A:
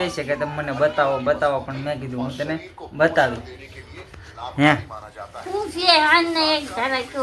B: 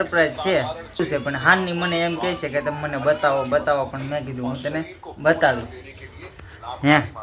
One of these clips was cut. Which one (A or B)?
B